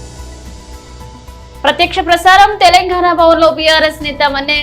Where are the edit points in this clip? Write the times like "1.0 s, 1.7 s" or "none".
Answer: none